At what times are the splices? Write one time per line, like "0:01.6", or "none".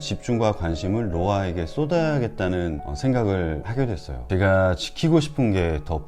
0:04.0